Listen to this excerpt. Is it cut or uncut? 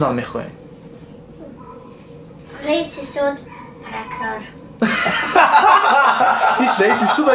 uncut